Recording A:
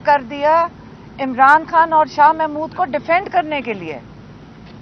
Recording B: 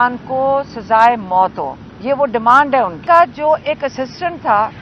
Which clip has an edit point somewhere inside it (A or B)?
B